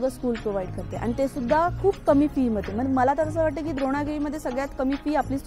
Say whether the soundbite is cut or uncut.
uncut